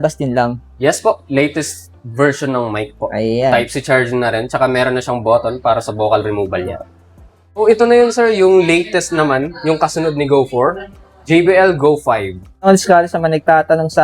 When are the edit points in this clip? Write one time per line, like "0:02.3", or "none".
0:07.6
0:12.7